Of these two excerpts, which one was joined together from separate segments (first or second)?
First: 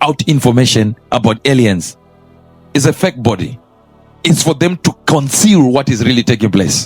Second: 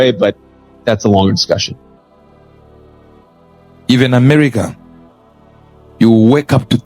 second